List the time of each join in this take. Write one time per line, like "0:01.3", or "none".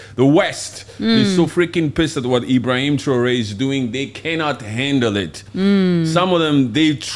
none